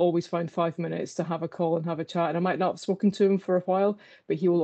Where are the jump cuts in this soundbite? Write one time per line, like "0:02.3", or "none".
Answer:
none